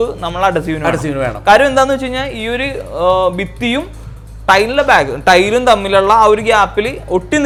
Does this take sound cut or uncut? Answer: uncut